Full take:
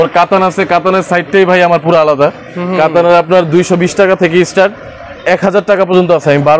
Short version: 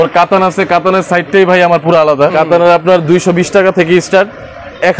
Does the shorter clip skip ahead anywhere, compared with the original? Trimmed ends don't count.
yes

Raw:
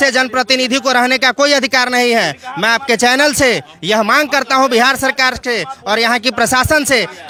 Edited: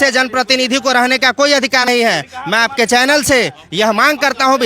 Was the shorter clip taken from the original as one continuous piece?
no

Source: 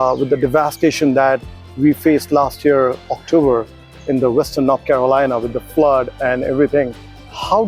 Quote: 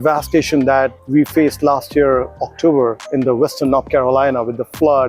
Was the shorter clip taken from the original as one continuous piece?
no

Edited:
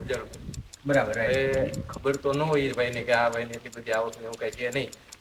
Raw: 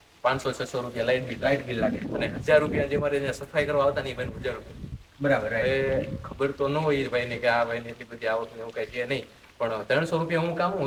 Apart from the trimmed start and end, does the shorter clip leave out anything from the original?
no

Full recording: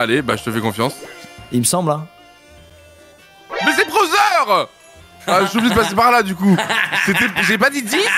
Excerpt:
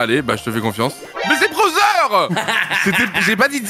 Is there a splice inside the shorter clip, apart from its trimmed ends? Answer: yes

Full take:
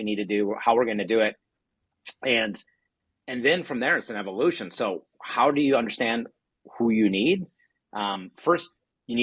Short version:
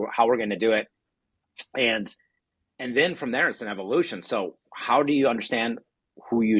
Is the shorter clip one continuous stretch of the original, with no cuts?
yes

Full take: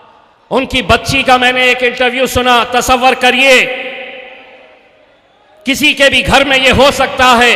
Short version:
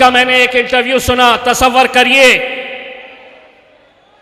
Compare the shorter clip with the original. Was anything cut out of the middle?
no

